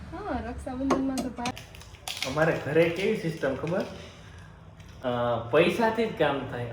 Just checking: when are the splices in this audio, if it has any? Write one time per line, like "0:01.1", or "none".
0:01.5